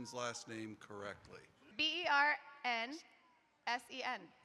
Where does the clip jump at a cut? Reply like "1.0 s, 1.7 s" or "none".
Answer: 1.7 s